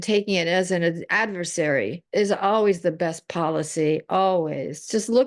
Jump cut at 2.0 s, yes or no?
yes